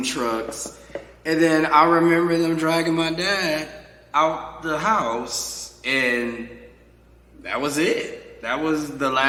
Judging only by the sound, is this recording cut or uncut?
uncut